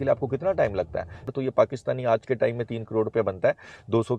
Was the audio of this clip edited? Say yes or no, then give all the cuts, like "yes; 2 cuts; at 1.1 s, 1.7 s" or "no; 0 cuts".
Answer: yes; 1 cut; at 1.3 s